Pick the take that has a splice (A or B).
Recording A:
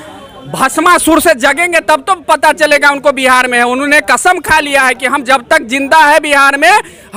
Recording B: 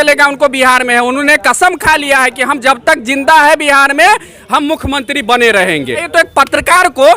B